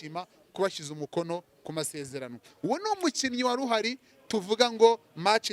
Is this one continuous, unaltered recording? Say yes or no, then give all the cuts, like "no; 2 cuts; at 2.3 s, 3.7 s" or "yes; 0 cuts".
yes; 0 cuts